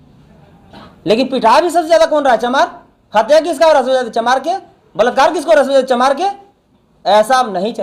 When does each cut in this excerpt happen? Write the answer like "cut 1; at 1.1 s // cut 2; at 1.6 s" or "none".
none

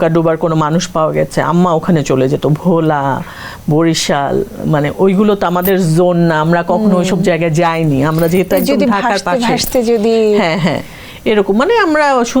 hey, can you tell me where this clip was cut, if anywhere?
none

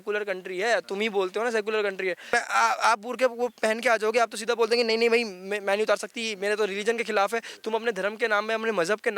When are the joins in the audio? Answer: cut 1; at 2.2 s

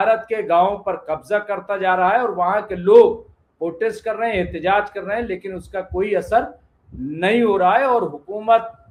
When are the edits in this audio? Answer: none

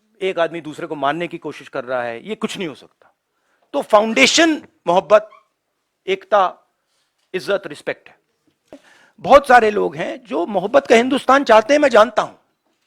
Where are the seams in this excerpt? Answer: cut 1; at 8.8 s

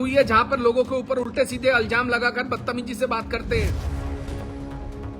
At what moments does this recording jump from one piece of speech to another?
cut 1; at 3.7 s

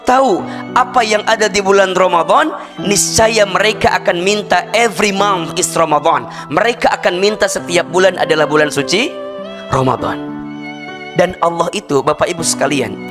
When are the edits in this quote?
none

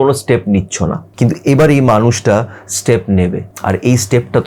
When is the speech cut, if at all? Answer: cut 1; at 1.0 s // cut 2; at 3.5 s

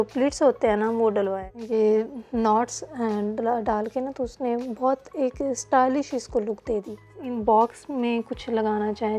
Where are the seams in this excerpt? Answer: cut 1; at 1.4 s // cut 2; at 7.2 s

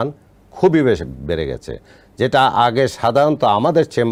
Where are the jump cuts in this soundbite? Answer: none

